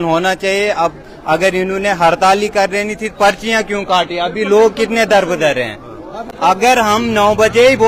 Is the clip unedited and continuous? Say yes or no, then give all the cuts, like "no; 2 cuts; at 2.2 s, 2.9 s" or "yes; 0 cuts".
yes; 0 cuts